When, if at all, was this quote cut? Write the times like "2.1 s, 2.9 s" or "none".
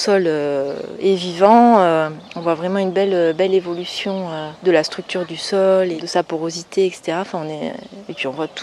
4.4 s, 6.0 s